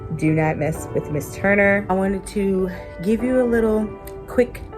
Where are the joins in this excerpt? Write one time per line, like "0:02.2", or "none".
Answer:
0:01.8